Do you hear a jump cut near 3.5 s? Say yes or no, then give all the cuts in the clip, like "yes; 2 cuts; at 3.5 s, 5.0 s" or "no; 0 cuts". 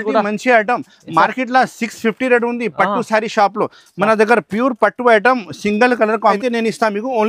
no; 1 cut; at 6.4 s